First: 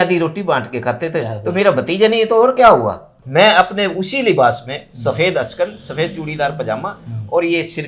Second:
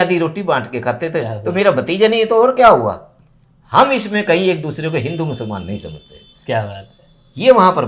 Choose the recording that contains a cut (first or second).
first